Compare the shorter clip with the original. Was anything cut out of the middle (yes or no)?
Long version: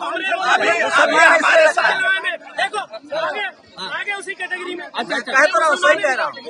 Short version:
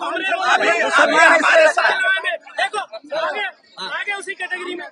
no